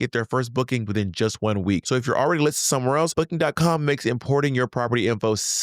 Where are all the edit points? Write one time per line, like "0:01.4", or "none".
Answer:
0:00.8
0:01.8
0:03.1